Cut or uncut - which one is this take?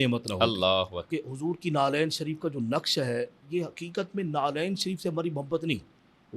cut